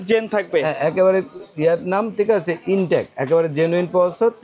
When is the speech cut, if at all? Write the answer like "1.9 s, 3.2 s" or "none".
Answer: none